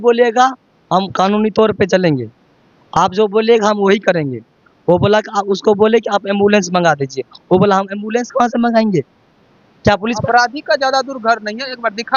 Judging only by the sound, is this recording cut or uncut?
cut